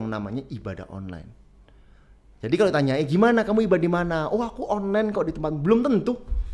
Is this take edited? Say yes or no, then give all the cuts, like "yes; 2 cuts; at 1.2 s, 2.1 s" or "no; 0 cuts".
no; 0 cuts